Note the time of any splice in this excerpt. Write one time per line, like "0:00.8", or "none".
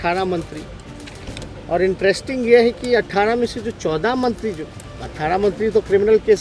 none